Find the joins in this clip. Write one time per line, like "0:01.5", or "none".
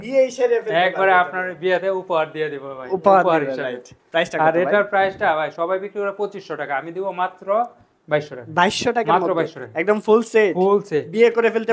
none